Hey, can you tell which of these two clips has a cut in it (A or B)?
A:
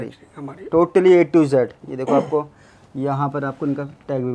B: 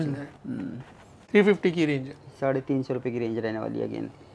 B